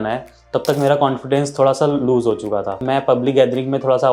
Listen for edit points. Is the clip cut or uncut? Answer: cut